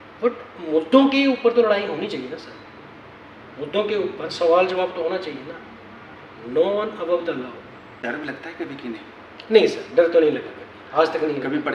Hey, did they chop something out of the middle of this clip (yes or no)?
yes